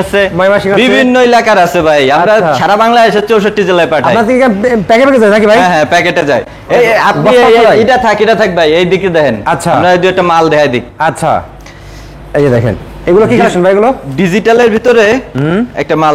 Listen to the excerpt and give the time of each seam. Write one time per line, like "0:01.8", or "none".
none